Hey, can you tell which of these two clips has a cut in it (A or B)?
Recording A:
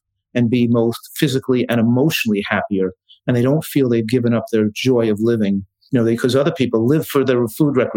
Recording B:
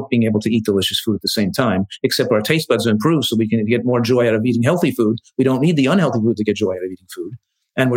A